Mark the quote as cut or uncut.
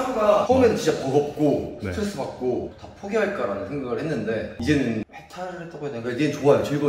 uncut